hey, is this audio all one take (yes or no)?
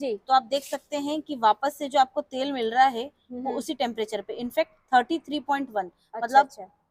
yes